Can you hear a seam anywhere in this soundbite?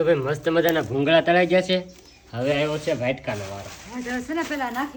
no; 0 cuts

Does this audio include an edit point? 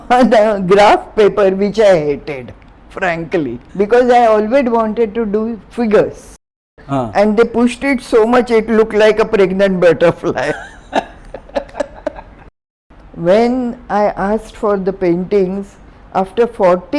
yes; 3 cuts; at 3.6 s, 6.7 s, 12.6 s

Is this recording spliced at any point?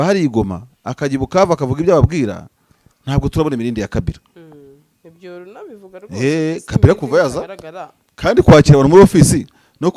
no; 0 cuts

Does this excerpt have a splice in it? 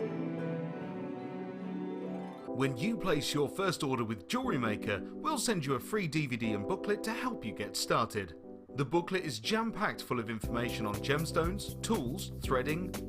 yes; 1 cut; at 2.3 s

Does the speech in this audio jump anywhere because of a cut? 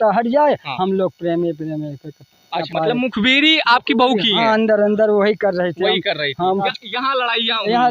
yes; 2 cuts; at 2.7 s, 6.6 s

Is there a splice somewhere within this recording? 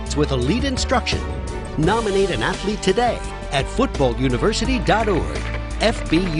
no; 0 cuts

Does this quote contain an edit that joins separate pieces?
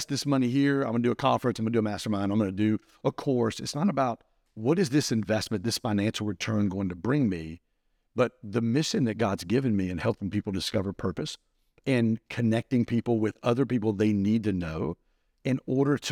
no; 0 cuts

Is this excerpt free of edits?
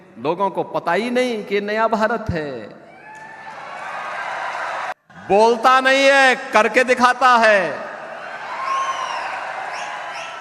no; 1 cut; at 4.9 s

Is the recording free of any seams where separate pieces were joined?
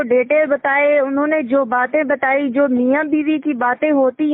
yes; 0 cuts

